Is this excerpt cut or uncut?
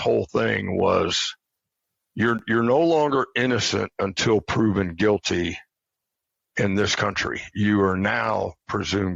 uncut